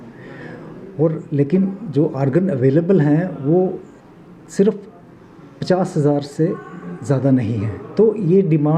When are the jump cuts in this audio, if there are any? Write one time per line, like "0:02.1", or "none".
0:07.8

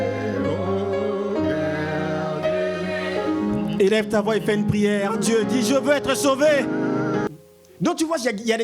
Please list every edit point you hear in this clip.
0:07.3

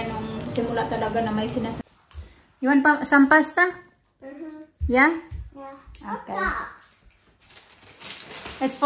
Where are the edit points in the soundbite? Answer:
0:01.8

